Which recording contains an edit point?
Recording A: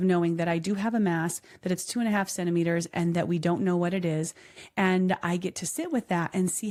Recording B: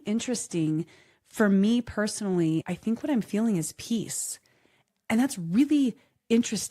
B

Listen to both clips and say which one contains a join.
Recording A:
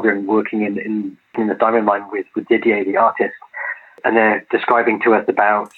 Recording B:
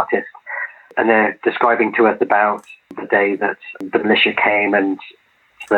B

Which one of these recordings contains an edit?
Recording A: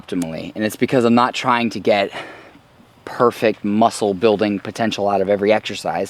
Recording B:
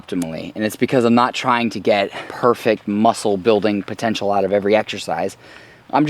B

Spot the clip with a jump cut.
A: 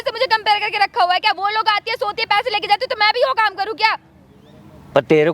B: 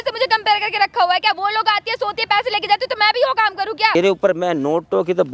B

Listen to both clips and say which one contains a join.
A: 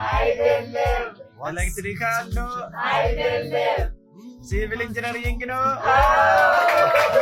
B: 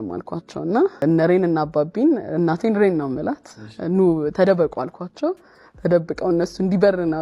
B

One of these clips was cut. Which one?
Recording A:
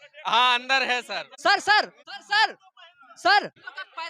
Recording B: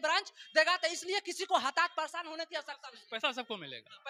A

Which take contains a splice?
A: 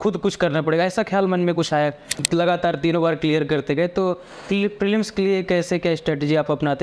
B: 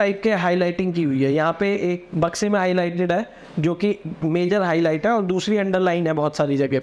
A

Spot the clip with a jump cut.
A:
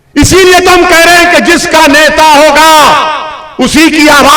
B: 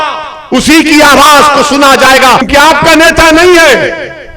B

